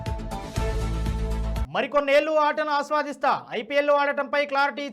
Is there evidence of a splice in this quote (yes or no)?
yes